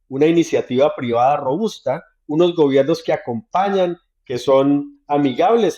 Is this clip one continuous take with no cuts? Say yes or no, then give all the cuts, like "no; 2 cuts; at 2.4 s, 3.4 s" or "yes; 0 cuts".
yes; 0 cuts